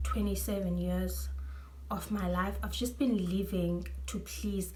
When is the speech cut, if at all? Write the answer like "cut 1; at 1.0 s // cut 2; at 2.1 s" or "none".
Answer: none